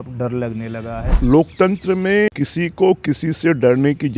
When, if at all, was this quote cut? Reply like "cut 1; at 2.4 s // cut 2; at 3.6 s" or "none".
cut 1; at 1.1 s // cut 2; at 2.3 s